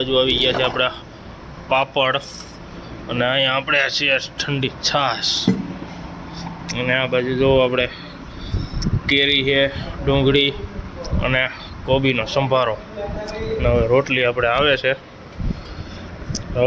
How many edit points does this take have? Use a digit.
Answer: 0